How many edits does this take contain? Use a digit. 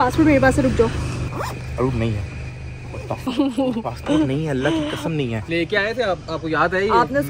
2